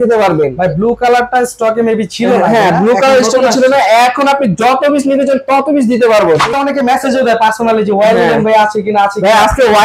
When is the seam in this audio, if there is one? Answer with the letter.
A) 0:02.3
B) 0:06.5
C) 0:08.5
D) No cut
B